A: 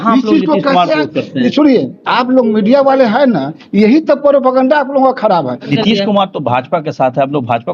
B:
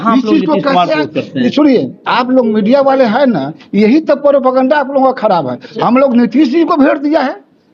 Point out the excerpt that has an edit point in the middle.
A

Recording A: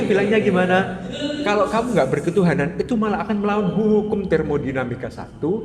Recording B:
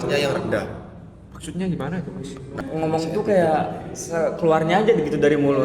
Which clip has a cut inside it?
B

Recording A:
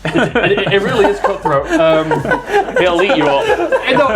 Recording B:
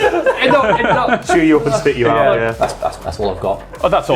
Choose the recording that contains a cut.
B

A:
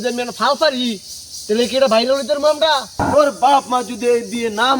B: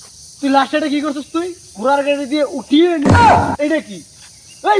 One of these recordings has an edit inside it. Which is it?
A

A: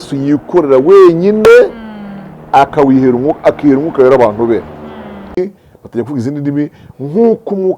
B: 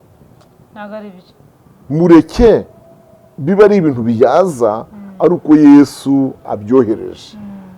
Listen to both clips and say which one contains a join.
A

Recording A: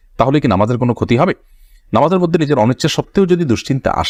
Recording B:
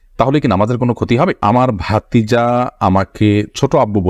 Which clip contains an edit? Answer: B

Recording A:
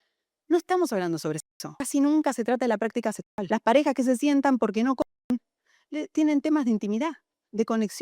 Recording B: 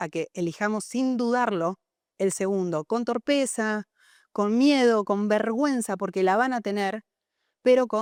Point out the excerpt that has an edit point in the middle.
A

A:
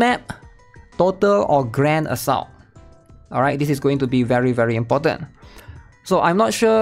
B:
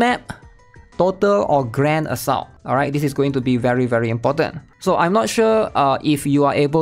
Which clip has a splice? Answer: B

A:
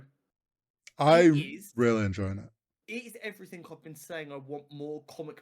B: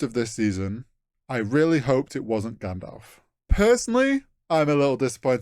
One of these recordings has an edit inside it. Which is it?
B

